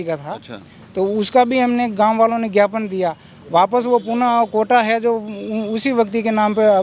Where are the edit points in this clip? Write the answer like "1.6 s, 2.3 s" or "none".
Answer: none